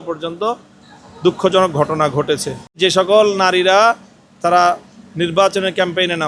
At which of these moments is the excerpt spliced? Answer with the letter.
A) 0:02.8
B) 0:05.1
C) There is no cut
A